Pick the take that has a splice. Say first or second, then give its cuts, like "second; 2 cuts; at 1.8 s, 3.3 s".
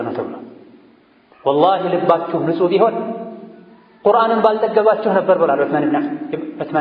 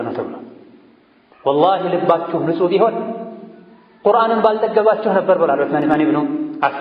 second; 1 cut; at 5.9 s